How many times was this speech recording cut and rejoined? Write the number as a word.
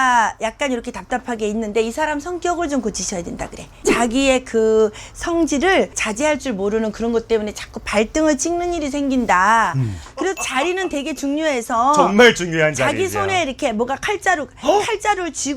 three